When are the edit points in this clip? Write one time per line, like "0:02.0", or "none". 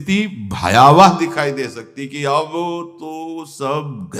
none